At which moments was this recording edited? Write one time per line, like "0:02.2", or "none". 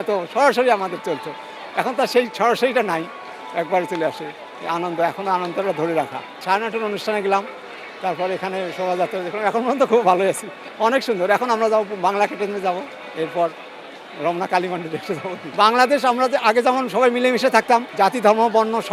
none